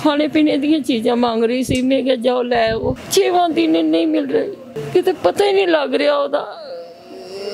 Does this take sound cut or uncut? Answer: cut